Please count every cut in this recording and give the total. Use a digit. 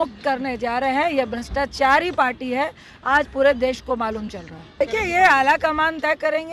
1